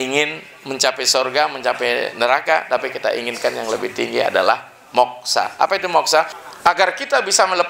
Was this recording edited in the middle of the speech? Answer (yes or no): yes